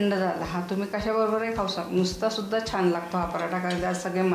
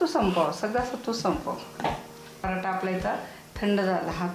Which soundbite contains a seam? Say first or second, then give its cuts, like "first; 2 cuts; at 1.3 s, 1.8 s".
second; 1 cut; at 2.4 s